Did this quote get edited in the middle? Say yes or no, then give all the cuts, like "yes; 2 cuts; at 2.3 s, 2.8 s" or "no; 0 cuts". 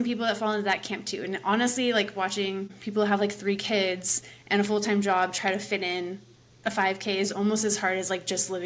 yes; 1 cut; at 2.8 s